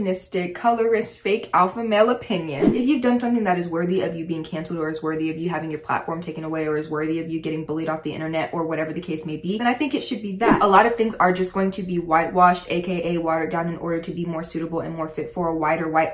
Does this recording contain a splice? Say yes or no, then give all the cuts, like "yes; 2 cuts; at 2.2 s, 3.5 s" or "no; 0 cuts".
yes; 2 cuts; at 2.7 s, 10.6 s